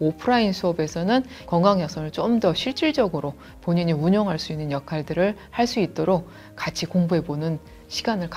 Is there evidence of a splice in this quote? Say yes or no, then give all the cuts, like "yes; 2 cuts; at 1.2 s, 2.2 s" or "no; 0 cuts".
no; 0 cuts